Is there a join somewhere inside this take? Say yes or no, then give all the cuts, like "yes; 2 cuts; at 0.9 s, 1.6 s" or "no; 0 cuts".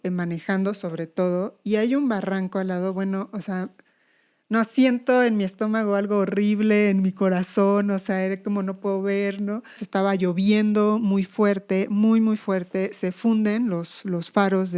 yes; 1 cut; at 9.8 s